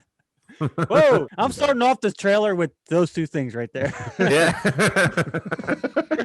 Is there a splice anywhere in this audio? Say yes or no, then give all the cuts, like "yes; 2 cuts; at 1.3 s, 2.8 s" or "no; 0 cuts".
yes; 1 cut; at 1.3 s